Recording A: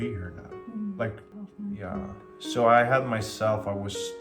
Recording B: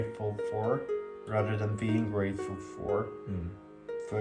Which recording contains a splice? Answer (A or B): A